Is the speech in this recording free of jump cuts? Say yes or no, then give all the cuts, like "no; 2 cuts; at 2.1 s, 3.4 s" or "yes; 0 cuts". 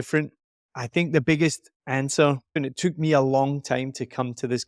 no; 1 cut; at 2.6 s